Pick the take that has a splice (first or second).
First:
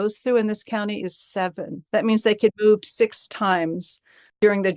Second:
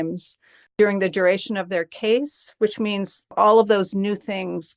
first